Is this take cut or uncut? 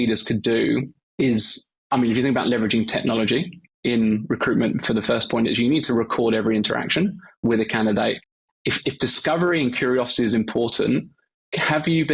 cut